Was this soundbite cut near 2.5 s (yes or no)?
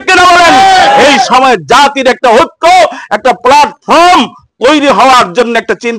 no